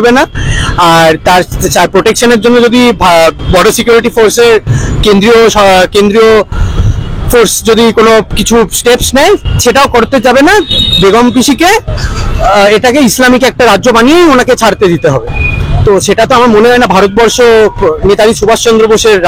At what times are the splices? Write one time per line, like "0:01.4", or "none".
none